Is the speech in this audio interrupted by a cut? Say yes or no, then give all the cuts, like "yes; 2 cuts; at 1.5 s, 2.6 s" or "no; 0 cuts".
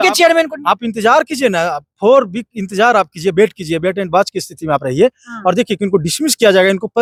no; 0 cuts